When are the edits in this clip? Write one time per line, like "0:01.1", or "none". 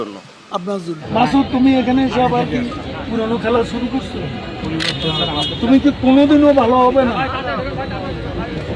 0:01.0